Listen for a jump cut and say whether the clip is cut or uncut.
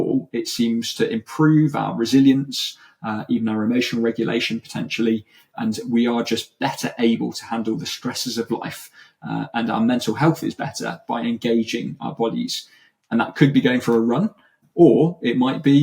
cut